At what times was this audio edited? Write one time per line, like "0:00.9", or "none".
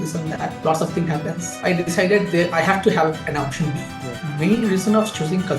0:04.2